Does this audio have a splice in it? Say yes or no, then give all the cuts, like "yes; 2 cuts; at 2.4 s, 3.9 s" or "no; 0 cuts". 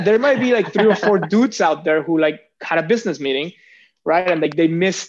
no; 0 cuts